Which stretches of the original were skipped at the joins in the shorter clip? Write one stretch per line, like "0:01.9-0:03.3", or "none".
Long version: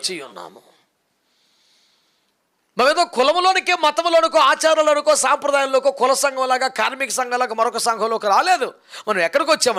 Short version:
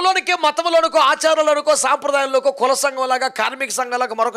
none